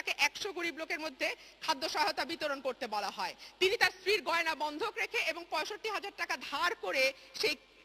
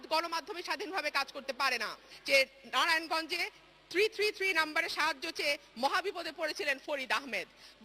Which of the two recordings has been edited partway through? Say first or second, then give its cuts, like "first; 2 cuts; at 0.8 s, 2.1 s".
second; 1 cut; at 2.1 s